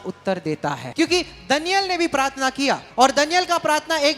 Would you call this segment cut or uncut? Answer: cut